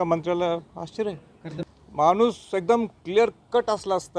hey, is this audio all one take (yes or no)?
no